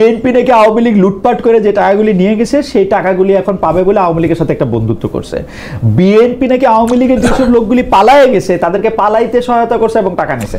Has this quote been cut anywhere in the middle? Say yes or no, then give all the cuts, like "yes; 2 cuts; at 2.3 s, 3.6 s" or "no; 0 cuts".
no; 0 cuts